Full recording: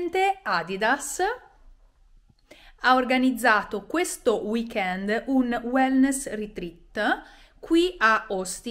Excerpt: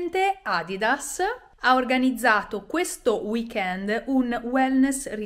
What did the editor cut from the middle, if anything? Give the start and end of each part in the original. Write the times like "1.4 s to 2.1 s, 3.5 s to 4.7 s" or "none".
1.5 s to 2.7 s